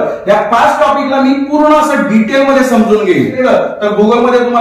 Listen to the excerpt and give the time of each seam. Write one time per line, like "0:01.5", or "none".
0:03.4